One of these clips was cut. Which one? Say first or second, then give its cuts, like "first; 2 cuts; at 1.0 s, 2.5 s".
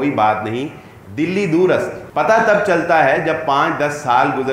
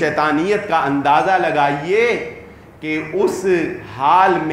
first; 1 cut; at 2.0 s